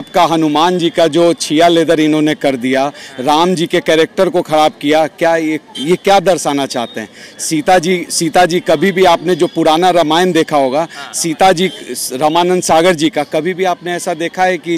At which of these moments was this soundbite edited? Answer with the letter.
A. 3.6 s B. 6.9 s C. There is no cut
C